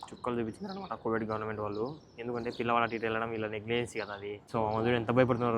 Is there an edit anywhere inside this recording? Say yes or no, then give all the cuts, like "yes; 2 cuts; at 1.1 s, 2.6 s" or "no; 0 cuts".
yes; 1 cut; at 4.4 s